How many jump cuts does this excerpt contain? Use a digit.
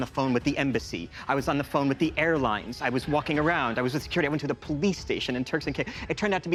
0